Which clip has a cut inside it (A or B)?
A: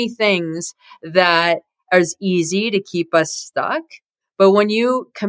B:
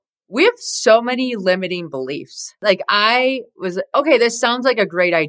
B